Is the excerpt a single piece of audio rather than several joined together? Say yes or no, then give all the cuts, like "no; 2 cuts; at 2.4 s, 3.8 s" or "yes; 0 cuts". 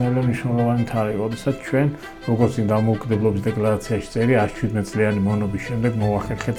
yes; 0 cuts